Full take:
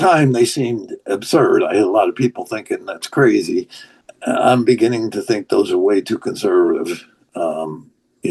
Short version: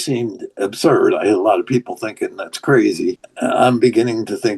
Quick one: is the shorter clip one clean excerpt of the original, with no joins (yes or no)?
no